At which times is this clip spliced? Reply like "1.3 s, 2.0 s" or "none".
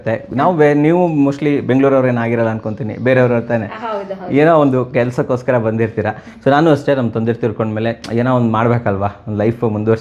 none